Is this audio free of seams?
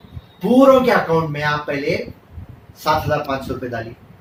yes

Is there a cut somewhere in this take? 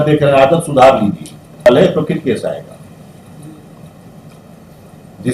yes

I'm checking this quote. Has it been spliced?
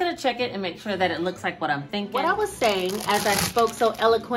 yes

